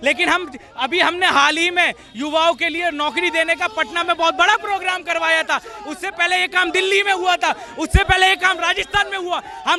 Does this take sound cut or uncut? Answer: uncut